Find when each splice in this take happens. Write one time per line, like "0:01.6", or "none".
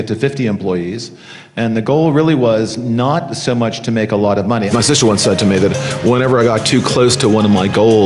0:04.7